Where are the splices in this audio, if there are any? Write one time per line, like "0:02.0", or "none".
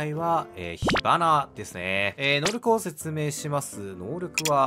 none